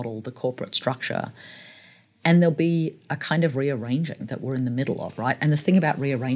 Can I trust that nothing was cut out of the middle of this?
yes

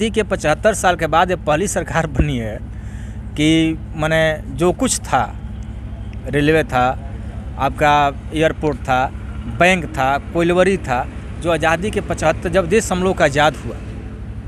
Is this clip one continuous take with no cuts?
yes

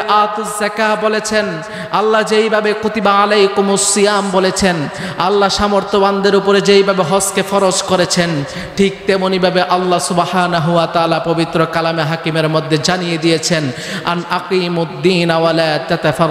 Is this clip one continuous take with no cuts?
yes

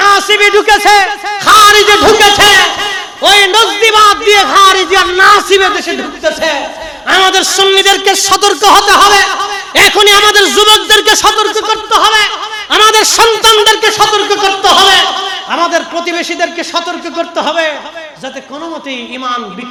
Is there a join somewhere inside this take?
no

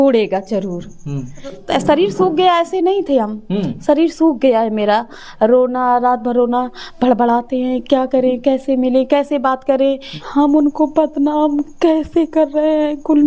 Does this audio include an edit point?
yes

